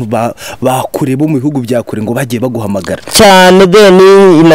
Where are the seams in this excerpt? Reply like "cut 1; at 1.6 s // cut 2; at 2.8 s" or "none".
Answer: none